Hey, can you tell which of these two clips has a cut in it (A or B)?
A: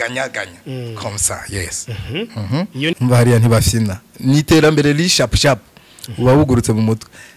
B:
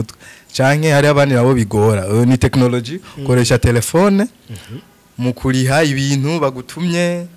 A